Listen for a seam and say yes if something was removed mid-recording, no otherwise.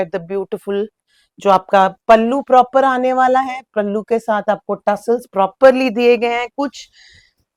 no